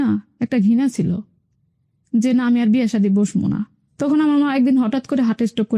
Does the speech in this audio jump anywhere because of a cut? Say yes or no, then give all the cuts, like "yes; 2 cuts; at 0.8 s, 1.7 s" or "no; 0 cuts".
yes; 1 cut; at 3.9 s